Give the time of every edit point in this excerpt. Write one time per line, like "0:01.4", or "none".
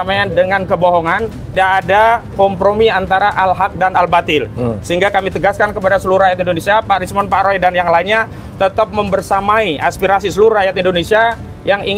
0:01.5

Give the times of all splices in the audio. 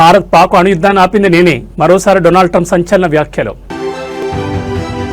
none

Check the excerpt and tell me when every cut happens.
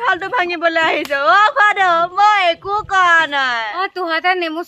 0:03.7

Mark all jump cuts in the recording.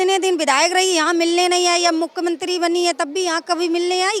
none

